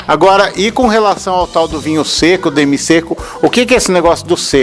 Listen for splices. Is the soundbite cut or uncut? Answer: uncut